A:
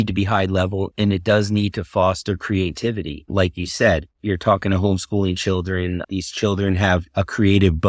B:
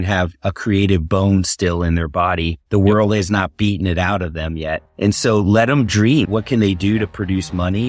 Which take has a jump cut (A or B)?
A